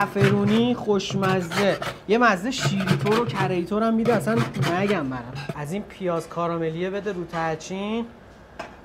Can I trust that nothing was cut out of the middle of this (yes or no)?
no